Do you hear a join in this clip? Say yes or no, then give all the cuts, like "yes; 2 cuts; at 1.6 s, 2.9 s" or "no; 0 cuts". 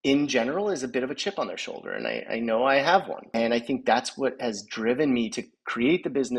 yes; 1 cut; at 3.2 s